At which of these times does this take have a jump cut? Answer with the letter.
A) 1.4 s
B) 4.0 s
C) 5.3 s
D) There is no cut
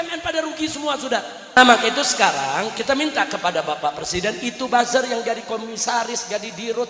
A